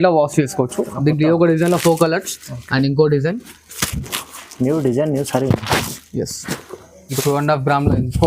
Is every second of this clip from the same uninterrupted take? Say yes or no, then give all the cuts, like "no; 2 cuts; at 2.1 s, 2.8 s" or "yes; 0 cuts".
no; 1 cut; at 7.1 s